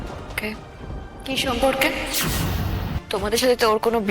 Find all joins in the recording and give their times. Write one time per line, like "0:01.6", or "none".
0:02.9